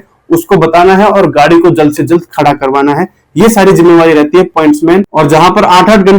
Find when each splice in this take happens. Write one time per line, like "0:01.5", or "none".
0:05.1